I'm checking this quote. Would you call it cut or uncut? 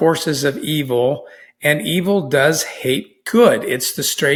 uncut